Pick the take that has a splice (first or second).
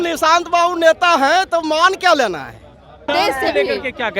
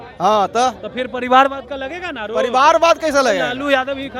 first